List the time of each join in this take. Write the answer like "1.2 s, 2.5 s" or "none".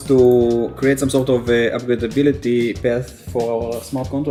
none